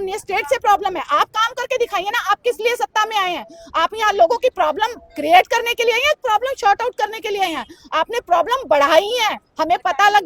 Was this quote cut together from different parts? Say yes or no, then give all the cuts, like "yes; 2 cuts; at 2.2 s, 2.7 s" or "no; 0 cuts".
no; 0 cuts